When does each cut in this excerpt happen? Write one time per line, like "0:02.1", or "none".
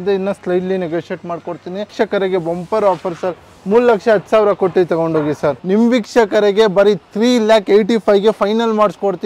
0:01.9
0:05.6